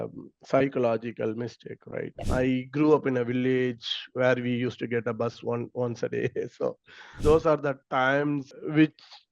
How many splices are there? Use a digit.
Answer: 3